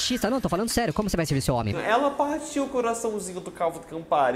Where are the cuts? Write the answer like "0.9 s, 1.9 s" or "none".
1.9 s

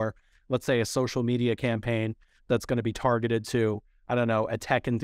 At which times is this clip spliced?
none

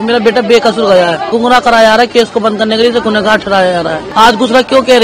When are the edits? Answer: 1.3 s, 4.0 s

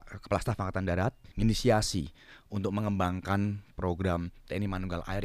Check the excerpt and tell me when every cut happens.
1.2 s

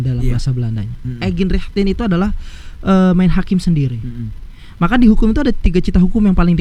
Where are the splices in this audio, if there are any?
none

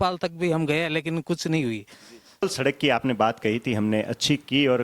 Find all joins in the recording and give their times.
2.4 s

